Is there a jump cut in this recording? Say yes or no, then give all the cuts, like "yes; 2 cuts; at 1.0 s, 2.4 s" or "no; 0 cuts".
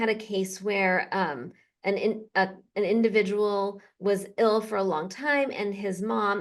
no; 0 cuts